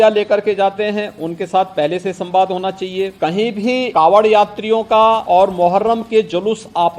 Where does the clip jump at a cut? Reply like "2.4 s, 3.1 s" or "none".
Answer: 3.1 s, 3.9 s, 5.2 s